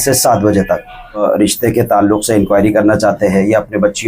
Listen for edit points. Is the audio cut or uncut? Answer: cut